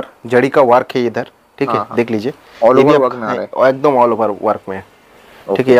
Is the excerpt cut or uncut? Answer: uncut